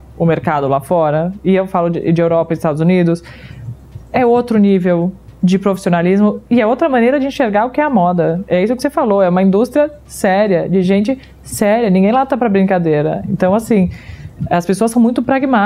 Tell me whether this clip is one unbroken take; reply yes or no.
yes